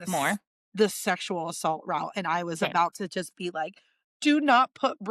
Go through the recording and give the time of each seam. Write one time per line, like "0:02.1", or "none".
none